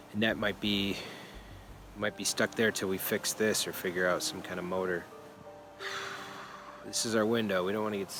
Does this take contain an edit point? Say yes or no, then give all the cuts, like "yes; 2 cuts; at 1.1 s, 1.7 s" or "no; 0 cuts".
no; 0 cuts